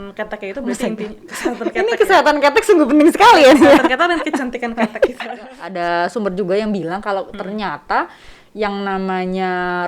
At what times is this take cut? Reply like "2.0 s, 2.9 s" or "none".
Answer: 5.5 s